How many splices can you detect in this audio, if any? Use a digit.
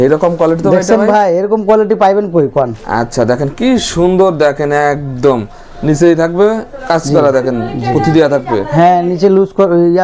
0